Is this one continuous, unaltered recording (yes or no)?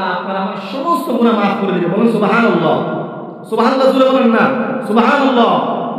no